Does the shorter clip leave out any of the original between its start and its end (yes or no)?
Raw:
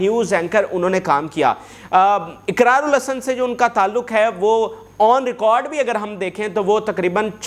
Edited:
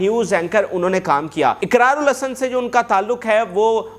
yes